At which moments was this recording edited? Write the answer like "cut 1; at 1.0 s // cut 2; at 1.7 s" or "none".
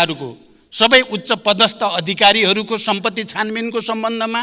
none